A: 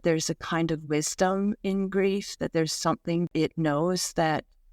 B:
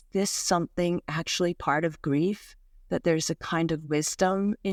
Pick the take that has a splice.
A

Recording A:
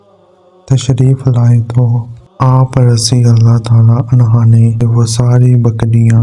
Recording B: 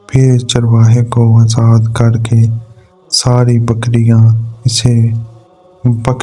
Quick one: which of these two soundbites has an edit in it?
A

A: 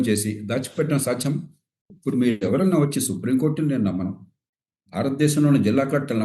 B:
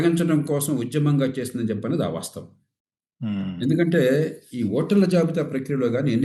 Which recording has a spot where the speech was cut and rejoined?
A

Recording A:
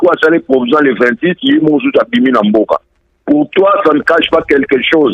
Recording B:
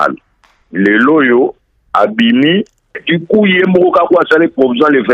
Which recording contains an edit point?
B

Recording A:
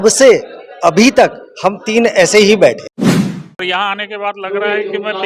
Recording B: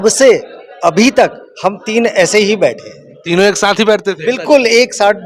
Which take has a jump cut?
A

